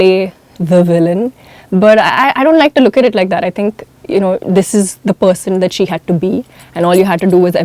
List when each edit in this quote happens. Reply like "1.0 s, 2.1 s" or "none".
none